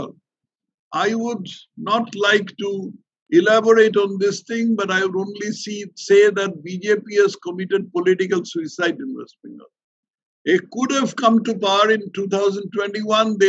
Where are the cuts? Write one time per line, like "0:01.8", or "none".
none